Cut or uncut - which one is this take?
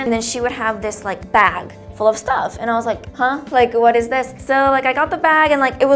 cut